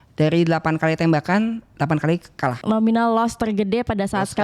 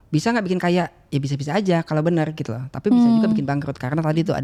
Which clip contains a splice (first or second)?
first